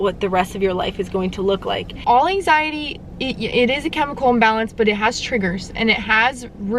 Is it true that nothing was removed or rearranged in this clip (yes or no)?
no